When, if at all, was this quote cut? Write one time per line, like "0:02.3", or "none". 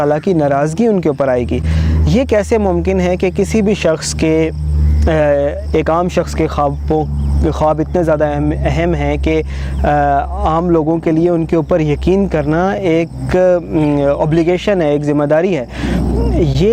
none